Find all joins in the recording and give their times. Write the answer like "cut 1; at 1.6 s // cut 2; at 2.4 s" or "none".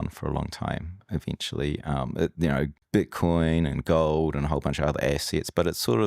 cut 1; at 2.8 s